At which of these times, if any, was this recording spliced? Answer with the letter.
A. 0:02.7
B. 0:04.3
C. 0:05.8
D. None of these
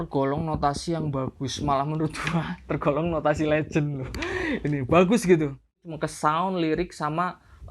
C